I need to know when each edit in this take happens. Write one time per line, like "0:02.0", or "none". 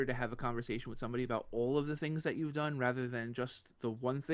none